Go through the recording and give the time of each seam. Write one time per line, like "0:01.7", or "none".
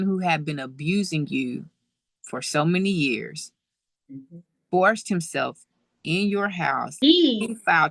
0:06.9